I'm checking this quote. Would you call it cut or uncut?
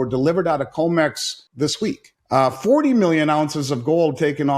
cut